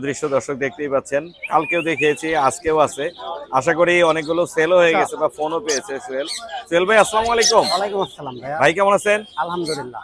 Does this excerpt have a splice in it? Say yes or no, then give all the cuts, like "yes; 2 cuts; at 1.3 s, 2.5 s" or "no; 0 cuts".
no; 0 cuts